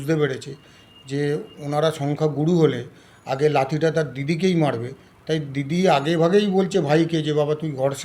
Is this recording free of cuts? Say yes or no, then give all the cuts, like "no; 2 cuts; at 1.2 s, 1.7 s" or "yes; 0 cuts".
yes; 0 cuts